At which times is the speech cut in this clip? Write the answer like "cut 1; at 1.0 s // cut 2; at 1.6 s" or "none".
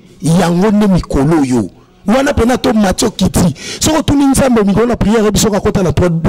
none